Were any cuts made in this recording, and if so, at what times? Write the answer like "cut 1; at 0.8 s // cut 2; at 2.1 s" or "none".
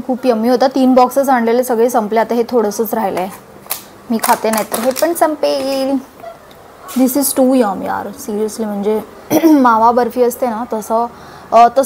none

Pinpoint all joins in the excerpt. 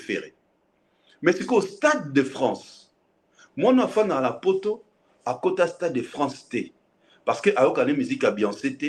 none

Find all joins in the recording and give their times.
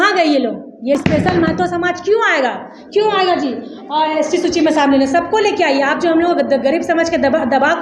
cut 1; at 1.0 s

